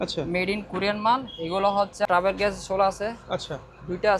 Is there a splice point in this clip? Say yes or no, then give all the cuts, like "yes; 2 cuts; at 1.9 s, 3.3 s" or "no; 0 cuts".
yes; 1 cut; at 2.1 s